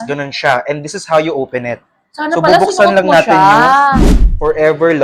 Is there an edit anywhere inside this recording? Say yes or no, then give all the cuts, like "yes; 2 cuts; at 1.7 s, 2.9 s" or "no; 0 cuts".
yes; 1 cut; at 4.0 s